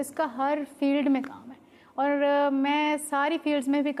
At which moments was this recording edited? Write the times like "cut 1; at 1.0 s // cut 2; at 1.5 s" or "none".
none